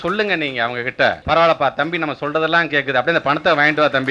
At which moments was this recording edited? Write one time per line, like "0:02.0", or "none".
0:01.2